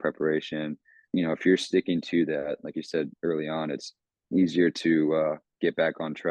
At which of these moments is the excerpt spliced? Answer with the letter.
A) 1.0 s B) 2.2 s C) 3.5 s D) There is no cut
A